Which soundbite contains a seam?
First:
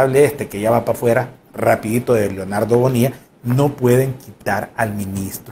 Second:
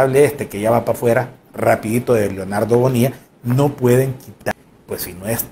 second; 1 cut; at 4.5 s

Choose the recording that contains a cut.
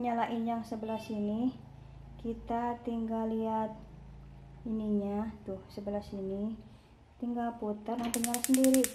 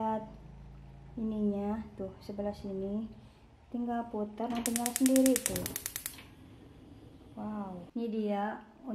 second; 1 cut; at 7.8 s

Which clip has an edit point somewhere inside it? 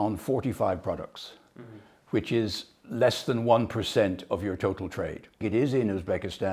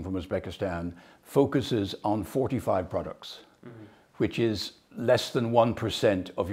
first; 1 cut; at 5.4 s

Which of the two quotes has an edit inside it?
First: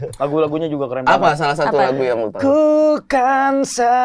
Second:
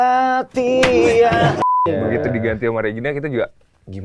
second; 1 cut; at 1.7 s

